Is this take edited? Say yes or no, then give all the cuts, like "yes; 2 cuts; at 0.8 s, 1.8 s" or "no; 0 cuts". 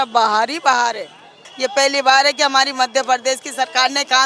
yes; 1 cut; at 1.5 s